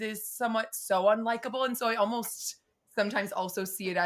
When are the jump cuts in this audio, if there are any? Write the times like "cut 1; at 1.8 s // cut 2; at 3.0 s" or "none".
none